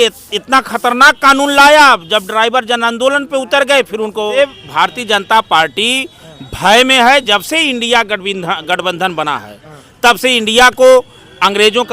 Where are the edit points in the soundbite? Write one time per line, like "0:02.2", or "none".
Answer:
0:04.4